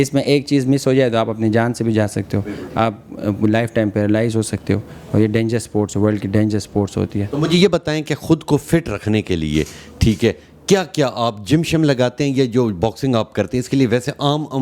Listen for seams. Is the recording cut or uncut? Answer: uncut